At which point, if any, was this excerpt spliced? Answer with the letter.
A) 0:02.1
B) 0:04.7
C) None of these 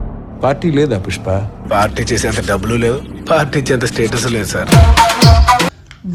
C